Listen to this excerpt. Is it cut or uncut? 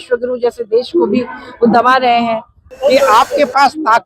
cut